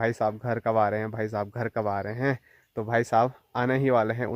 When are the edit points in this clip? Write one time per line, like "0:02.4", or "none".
none